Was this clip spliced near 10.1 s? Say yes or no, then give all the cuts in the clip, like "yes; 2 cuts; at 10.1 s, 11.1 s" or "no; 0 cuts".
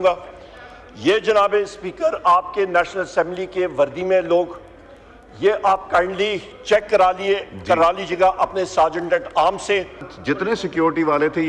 yes; 1 cut; at 10.1 s